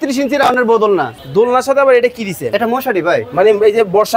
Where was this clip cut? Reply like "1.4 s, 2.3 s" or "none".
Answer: 1.2 s

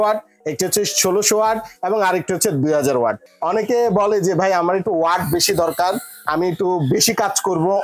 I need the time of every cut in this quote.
3.3 s

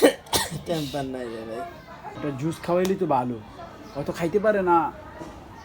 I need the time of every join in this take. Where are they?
2.1 s

